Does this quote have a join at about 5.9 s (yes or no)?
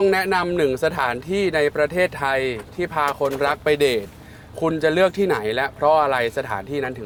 no